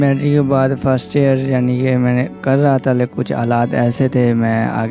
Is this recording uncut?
yes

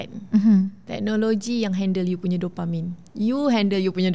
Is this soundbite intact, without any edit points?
yes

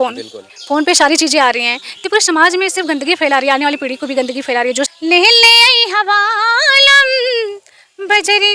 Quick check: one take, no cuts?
no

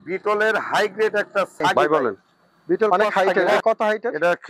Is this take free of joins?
no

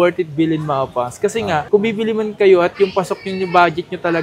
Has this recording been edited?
no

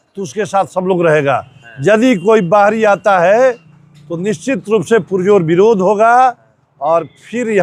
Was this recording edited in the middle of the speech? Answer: no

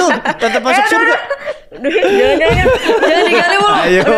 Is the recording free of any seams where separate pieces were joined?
yes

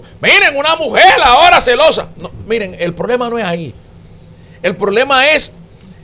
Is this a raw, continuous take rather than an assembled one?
yes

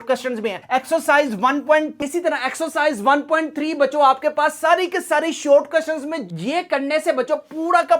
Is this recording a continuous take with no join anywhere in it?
no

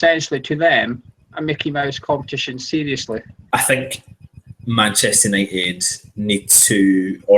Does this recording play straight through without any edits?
no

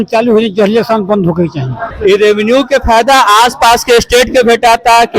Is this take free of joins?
no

